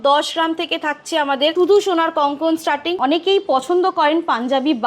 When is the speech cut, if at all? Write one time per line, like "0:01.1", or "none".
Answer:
0:01.5
0:02.9